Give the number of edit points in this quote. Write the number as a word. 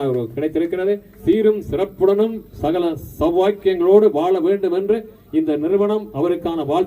one